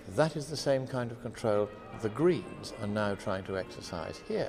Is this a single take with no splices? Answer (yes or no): yes